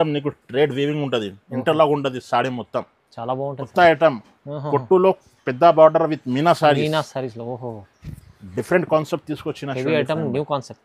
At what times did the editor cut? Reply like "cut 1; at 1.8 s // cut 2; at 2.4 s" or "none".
cut 1; at 3.6 s